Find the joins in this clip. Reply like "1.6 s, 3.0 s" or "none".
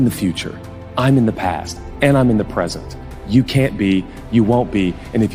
none